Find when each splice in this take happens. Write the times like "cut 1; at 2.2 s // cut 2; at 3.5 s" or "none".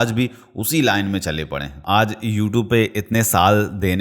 cut 1; at 1.7 s